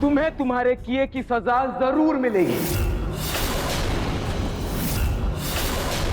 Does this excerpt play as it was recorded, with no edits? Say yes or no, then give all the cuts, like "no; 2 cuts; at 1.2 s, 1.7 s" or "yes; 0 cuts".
yes; 0 cuts